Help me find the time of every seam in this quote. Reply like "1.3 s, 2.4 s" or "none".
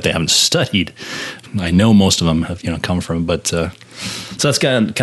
1.4 s